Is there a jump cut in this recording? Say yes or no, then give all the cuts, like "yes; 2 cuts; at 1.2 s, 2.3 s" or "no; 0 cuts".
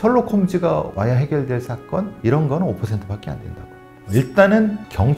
no; 0 cuts